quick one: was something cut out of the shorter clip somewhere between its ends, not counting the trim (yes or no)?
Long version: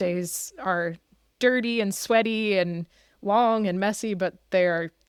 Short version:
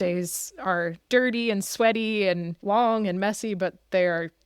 yes